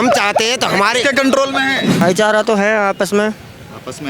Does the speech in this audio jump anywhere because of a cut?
yes; 1 cut; at 2.0 s

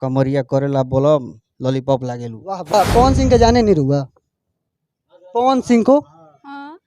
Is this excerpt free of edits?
no; 1 cut; at 2.7 s

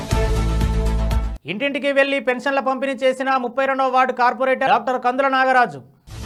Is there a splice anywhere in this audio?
no; 0 cuts

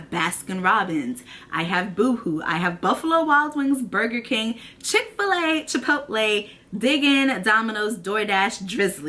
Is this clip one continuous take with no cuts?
yes; 0 cuts

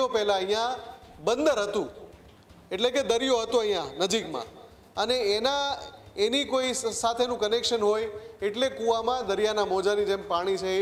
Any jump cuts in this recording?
no; 0 cuts

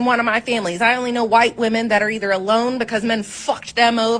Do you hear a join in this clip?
yes; 1 cut; at 2.5 s

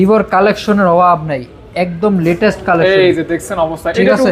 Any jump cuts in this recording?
no; 0 cuts

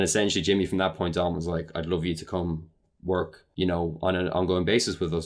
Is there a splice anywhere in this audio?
no; 0 cuts

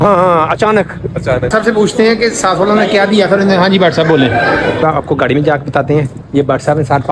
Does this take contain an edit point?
yes; 2 cuts; at 1.5 s, 4.8 s

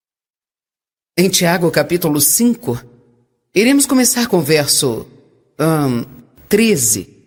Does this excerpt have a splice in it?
no; 0 cuts

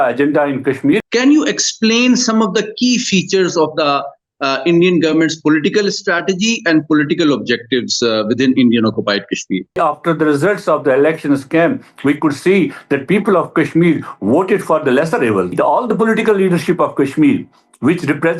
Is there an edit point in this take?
yes; 3 cuts; at 1.0 s, 9.8 s, 15.5 s

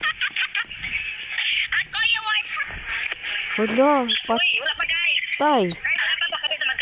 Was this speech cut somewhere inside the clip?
no; 0 cuts

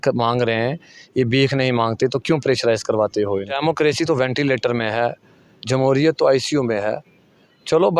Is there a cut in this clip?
yes; 1 cut; at 3.5 s

